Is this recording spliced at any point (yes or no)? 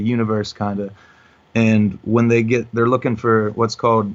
no